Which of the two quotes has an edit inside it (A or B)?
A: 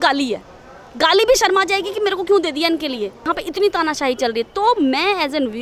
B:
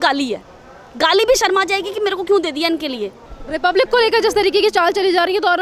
A